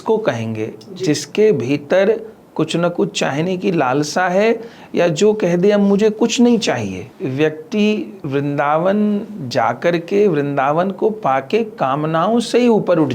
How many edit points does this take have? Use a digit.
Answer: 2